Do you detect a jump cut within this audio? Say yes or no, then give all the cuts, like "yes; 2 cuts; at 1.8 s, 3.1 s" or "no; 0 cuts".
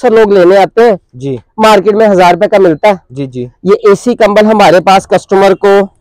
no; 0 cuts